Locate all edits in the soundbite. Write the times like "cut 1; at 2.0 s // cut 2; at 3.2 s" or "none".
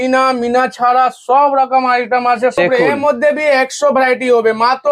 cut 1; at 2.6 s